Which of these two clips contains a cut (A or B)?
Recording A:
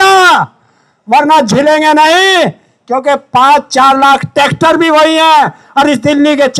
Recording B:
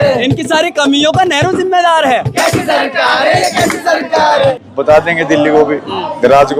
B